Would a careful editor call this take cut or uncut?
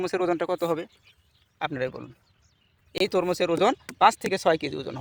uncut